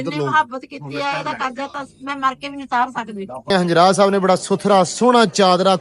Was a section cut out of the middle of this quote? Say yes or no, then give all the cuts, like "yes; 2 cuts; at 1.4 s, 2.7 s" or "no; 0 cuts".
yes; 1 cut; at 3.5 s